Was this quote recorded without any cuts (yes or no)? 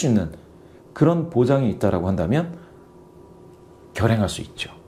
yes